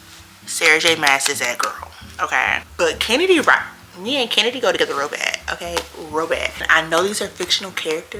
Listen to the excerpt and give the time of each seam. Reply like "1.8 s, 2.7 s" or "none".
2.7 s, 6.6 s

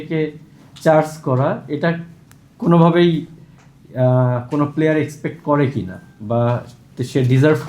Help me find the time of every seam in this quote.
none

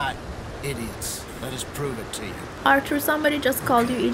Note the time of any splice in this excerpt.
2.6 s

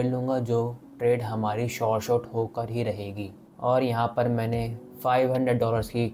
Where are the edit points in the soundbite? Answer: none

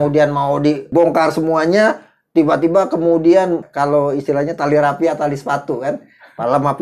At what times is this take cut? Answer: 0.9 s, 3.7 s

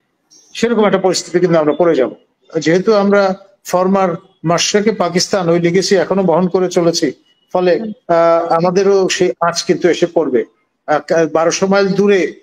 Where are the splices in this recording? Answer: 2.4 s

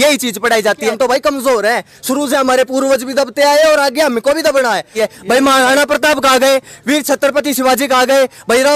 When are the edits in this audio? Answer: 0.9 s, 4.9 s

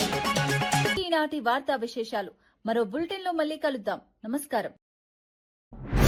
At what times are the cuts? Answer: none

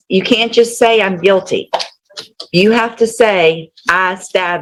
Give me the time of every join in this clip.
none

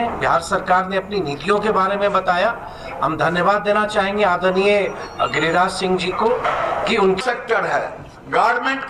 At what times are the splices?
7.2 s

